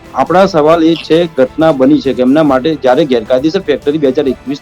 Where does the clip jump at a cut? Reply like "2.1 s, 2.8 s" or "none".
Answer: none